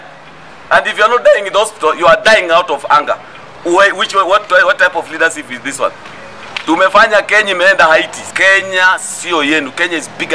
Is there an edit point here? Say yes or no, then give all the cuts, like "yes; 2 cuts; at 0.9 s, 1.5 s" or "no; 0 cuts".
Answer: yes; 1 cut; at 8.2 s